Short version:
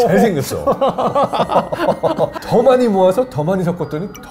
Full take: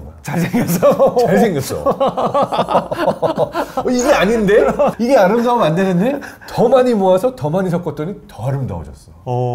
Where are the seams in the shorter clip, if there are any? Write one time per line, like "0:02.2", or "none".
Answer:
0:02.4